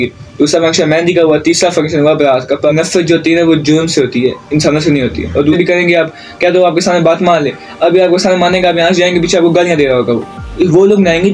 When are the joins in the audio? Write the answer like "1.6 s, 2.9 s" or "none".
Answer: 2.7 s, 5.5 s, 10.4 s